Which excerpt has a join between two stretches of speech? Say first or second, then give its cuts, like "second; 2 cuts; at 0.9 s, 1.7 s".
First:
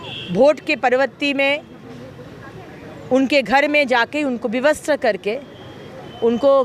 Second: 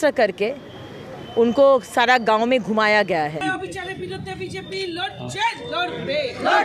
second; 1 cut; at 3.4 s